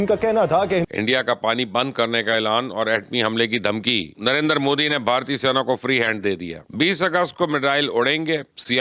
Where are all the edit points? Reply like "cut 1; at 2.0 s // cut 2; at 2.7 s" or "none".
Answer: cut 1; at 0.9 s